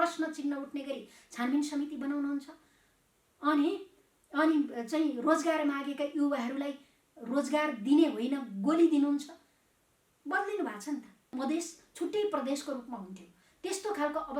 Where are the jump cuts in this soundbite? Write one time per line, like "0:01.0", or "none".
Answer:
0:11.3